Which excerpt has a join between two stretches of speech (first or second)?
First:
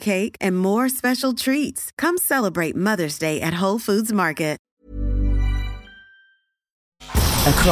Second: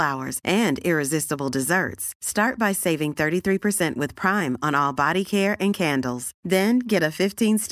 first